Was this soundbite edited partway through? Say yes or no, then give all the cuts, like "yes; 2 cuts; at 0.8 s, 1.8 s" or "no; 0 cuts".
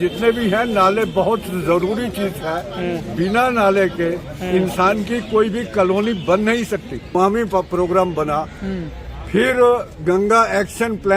yes; 1 cut; at 7.1 s